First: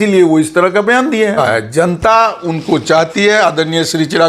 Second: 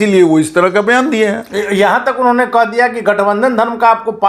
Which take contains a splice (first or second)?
first